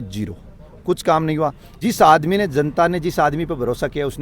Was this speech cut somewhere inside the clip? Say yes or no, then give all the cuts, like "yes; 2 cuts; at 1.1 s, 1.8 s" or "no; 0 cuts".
yes; 1 cut; at 1.8 s